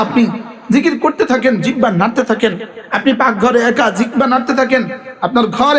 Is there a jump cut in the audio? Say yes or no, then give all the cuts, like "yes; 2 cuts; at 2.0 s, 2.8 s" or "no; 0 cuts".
no; 0 cuts